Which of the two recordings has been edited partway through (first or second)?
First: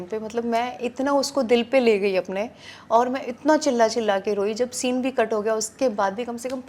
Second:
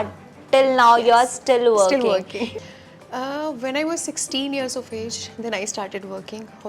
second